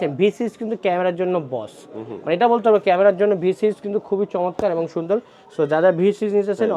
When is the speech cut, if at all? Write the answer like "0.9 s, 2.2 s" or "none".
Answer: none